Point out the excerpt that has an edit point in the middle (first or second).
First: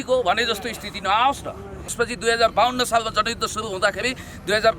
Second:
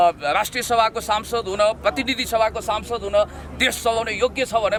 first